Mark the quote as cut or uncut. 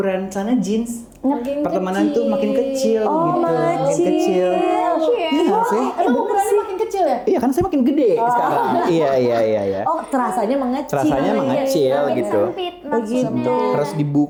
uncut